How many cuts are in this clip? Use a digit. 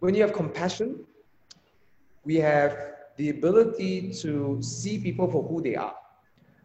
0